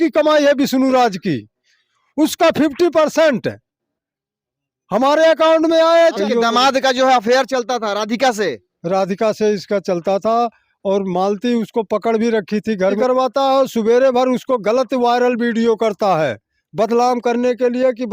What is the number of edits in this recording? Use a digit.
2